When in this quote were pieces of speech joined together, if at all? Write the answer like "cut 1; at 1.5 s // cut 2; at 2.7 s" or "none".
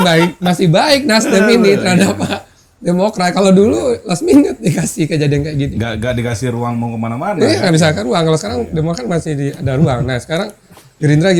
none